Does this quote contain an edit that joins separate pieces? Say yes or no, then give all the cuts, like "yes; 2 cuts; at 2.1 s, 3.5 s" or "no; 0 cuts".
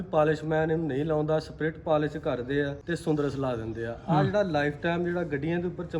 yes; 1 cut; at 2.8 s